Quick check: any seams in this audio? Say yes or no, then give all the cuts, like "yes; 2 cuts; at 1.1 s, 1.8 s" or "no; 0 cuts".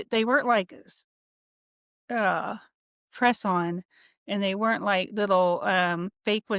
no; 0 cuts